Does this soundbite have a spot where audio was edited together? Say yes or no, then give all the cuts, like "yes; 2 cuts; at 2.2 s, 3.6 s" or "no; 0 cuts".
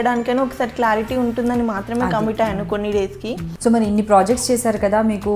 yes; 1 cut; at 3.5 s